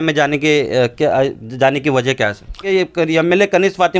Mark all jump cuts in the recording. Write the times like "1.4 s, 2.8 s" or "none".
2.7 s